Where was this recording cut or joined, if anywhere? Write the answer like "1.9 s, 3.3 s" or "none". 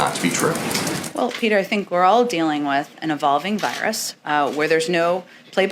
none

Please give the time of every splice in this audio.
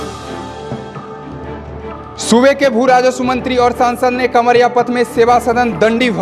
none

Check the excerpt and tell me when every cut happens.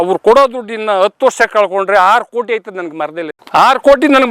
none

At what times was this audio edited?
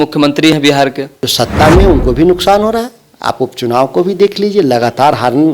1.1 s

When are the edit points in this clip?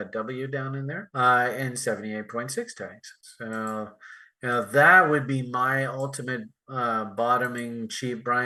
none

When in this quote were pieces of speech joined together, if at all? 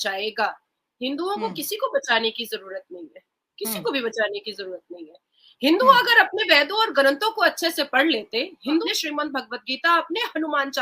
8.8 s

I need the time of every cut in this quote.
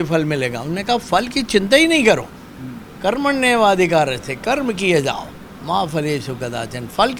none

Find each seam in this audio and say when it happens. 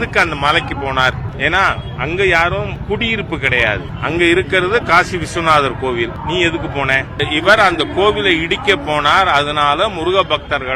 none

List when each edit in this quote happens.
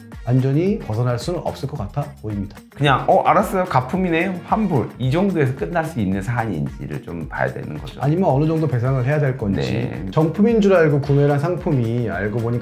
2.6 s, 10.0 s

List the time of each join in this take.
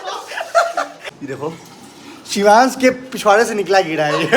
1.1 s

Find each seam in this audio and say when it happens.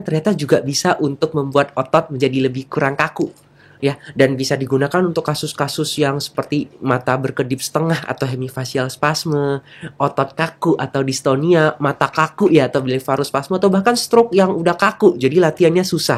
none

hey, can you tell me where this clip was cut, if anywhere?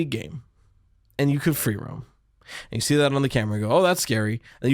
none

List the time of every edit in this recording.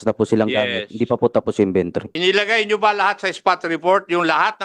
2.1 s

